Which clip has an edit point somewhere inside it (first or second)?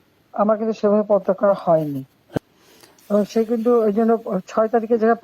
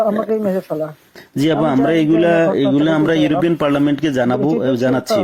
first